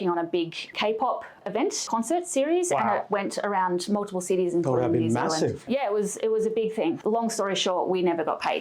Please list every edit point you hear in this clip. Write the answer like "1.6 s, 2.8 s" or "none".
1.8 s, 5.7 s, 7.0 s